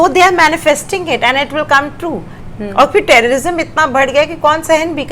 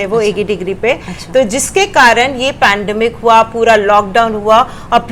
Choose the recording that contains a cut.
first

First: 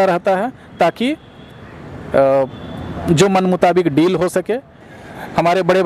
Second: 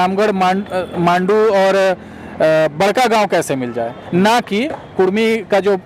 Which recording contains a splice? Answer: first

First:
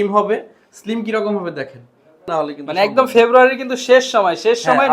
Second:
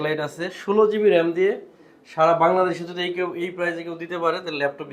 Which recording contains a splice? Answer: first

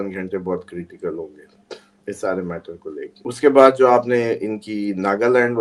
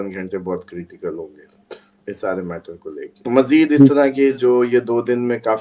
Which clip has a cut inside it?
second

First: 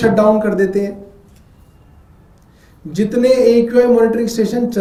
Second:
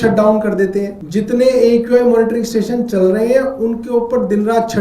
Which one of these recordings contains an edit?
second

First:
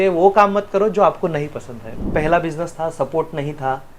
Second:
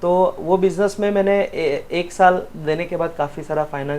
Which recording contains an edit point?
first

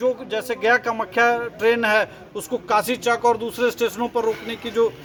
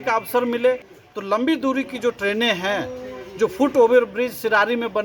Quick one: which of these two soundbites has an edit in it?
second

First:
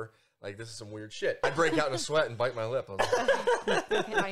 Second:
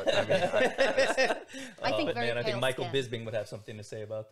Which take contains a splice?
first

